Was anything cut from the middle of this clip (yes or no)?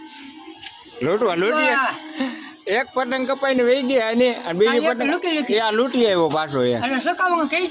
no